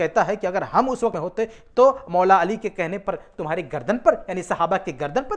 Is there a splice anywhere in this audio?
yes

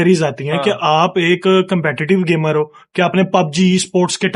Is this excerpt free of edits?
yes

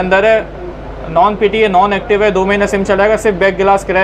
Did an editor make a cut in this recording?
no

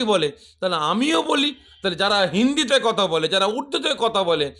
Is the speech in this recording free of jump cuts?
yes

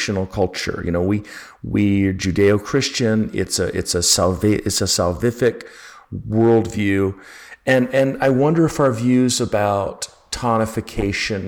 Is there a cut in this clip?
no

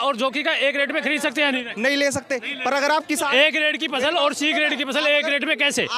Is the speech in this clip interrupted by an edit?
no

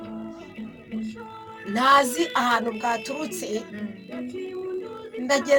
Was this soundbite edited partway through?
yes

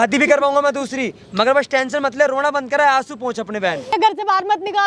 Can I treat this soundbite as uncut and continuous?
no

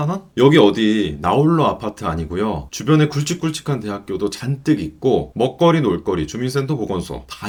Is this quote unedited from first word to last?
yes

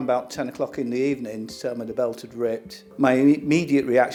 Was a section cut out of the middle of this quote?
no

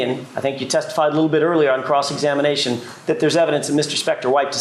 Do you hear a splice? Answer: no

